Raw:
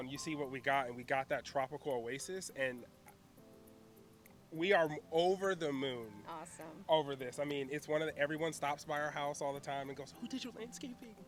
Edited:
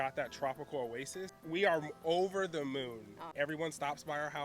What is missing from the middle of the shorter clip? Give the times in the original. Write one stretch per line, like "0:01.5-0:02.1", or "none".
0:02.5-0:04.4
0:06.4-0:08.1